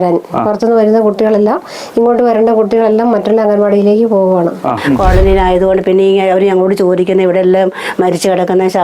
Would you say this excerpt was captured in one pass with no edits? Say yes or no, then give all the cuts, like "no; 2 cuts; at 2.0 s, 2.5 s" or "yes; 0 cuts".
no; 1 cut; at 4.8 s